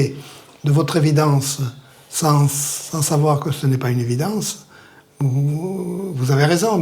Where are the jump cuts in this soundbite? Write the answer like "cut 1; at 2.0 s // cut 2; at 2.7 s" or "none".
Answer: none

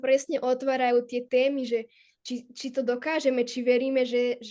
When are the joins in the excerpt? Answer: none

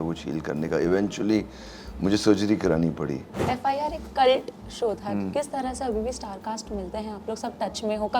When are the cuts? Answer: cut 1; at 3.3 s

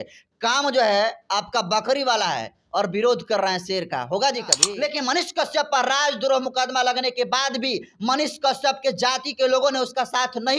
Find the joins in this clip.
cut 1; at 4.6 s

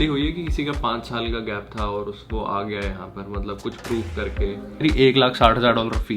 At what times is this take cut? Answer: cut 1; at 4.8 s

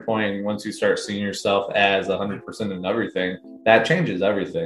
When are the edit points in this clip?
cut 1; at 3.5 s

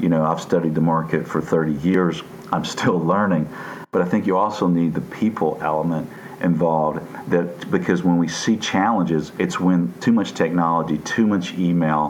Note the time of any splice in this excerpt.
cut 1; at 3.7 s

